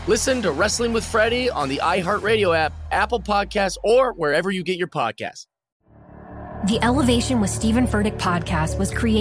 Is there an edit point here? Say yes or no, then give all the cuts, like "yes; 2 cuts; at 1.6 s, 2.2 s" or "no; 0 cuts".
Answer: no; 0 cuts